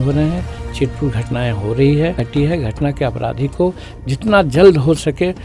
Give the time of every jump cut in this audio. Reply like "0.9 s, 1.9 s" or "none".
2.2 s